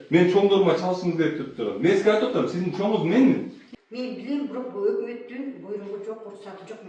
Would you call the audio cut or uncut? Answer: cut